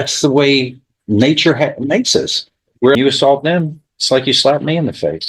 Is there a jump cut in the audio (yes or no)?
yes